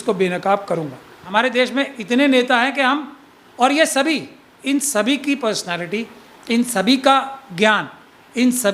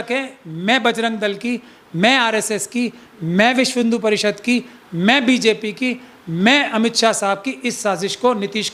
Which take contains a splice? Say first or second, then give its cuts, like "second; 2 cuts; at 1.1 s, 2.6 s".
first; 1 cut; at 1.2 s